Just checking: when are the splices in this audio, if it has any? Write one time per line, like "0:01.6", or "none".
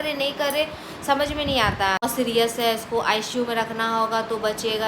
0:02.0